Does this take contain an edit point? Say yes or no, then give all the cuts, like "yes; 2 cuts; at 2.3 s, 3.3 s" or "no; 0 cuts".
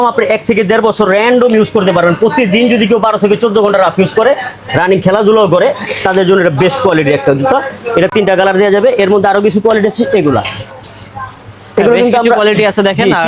no; 0 cuts